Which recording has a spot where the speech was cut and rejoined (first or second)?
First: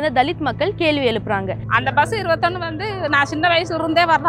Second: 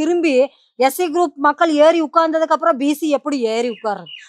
first